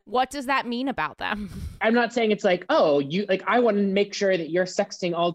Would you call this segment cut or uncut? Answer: cut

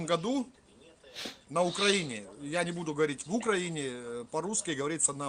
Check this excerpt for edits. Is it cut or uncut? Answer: uncut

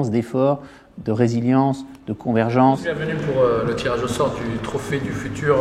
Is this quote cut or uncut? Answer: cut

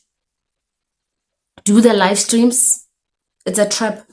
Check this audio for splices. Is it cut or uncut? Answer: uncut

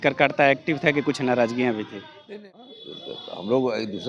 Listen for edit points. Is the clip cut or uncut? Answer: cut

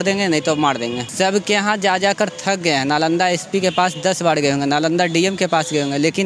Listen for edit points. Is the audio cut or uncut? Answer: cut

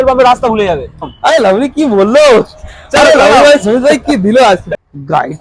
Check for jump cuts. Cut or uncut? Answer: cut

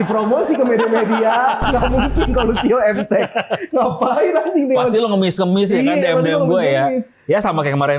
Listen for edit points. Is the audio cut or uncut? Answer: uncut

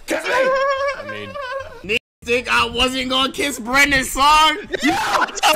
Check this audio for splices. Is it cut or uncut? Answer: cut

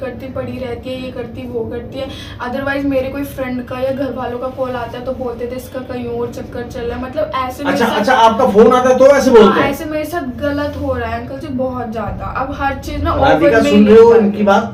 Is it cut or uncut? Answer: uncut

